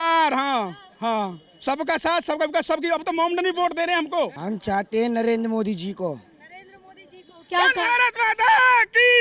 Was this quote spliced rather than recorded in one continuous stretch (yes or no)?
yes